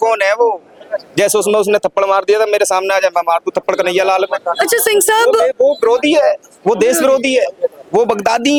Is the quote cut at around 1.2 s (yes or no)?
no